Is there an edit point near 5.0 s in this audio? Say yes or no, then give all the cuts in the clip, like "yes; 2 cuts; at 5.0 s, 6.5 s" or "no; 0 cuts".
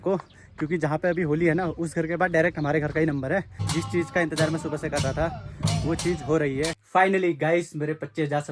no; 2 cuts; at 3.6 s, 6.8 s